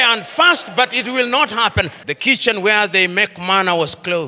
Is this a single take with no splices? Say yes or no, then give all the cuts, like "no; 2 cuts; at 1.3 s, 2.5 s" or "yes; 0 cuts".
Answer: no; 1 cut; at 2.0 s